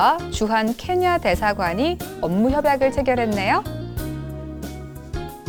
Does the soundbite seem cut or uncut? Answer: uncut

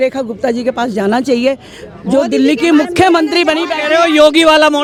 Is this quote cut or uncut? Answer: uncut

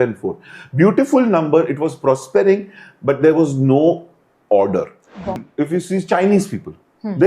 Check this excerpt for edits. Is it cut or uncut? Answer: cut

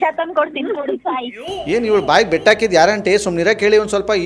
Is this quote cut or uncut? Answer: uncut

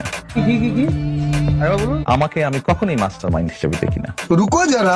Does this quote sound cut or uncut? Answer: uncut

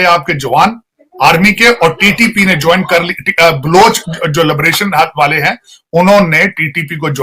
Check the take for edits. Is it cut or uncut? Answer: uncut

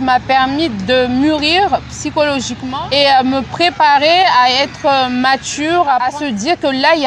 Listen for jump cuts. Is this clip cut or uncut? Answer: cut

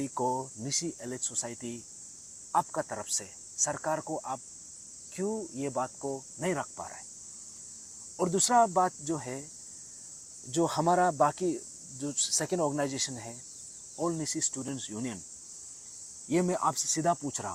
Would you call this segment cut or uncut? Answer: uncut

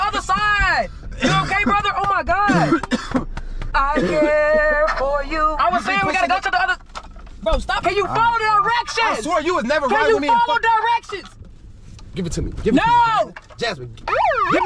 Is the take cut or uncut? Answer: cut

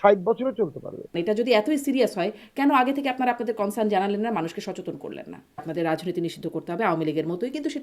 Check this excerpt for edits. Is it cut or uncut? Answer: cut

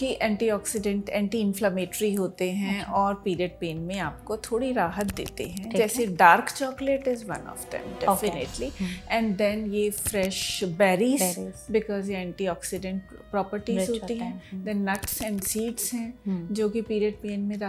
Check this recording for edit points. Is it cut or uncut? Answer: uncut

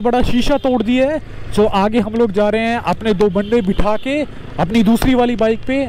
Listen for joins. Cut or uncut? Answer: uncut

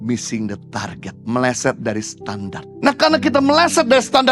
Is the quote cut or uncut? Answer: cut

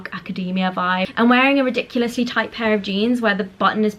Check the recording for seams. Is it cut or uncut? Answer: cut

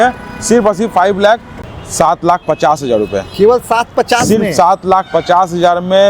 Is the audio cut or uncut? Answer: cut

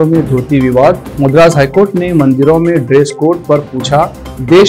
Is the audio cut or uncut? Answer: uncut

